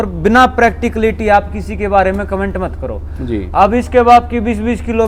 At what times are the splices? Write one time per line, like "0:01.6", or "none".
none